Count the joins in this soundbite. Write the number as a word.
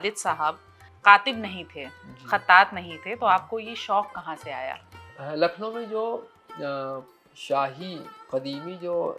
zero